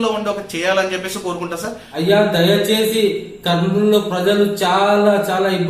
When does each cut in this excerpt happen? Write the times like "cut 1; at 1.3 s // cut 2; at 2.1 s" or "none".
cut 1; at 1.8 s